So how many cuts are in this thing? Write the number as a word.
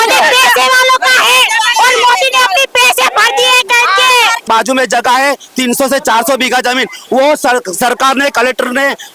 one